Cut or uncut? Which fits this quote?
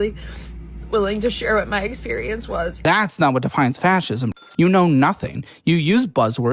cut